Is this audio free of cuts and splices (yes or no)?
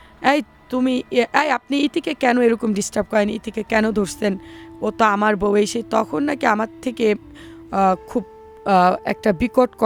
yes